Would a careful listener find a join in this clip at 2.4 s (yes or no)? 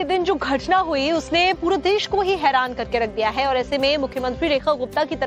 yes